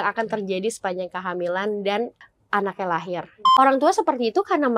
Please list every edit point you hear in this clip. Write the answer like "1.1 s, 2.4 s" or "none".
2.2 s, 3.4 s